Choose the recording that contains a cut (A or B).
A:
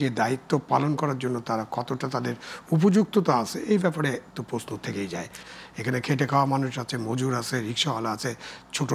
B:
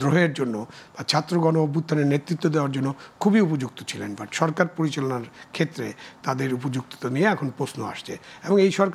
A